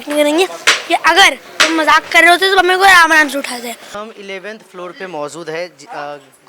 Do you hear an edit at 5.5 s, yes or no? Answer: no